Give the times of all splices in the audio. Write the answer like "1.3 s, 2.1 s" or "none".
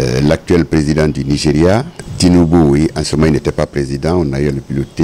2.0 s